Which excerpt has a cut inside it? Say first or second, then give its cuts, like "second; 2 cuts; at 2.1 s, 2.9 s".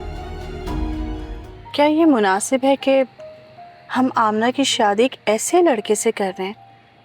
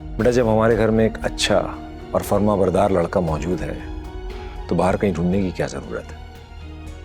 first; 1 cut; at 1.4 s